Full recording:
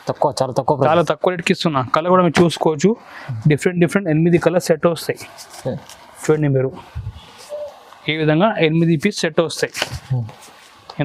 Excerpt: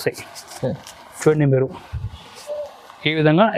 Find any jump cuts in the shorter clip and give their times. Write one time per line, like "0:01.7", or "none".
none